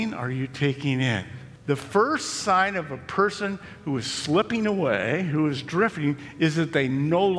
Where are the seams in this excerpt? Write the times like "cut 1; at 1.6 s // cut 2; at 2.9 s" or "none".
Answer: cut 1; at 1.5 s